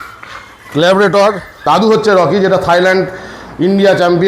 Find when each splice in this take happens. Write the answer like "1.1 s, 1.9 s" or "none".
1.6 s